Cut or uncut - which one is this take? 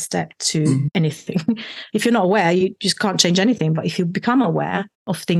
uncut